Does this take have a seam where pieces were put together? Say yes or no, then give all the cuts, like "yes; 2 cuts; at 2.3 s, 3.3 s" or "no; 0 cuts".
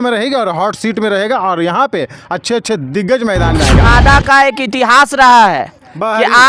yes; 1 cut; at 3.9 s